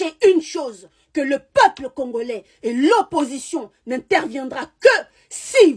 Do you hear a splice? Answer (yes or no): no